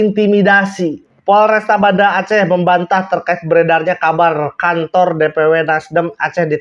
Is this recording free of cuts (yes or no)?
no